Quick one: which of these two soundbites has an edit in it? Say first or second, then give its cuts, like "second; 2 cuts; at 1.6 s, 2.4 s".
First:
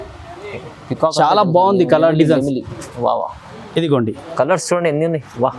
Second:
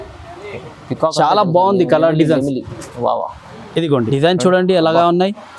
second; 1 cut; at 4.1 s